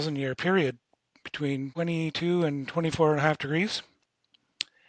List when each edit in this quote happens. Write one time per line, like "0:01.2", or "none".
0:01.7